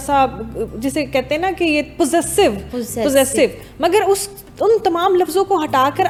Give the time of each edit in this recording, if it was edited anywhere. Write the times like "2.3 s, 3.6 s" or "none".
none